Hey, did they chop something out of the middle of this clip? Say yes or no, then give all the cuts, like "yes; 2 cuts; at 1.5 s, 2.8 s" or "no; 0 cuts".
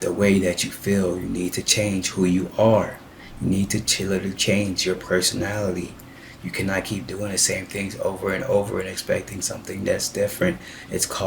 no; 0 cuts